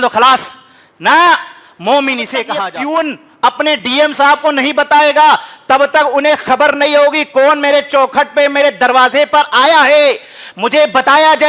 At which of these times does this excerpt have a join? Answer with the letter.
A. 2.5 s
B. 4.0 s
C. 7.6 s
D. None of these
A